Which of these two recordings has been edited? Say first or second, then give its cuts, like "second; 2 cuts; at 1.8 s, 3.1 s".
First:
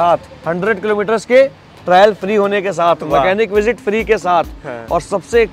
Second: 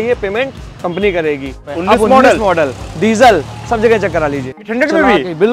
second; 2 cuts; at 1.6 s, 4.7 s